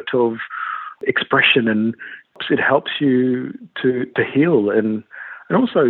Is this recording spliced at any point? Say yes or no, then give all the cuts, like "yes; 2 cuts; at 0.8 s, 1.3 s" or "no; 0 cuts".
yes; 2 cuts; at 1.0 s, 2.4 s